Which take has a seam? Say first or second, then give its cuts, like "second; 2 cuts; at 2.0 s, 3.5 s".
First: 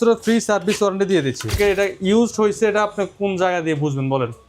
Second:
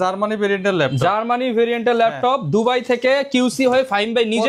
first; 1 cut; at 1.5 s